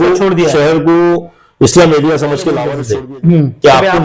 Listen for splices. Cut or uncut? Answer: cut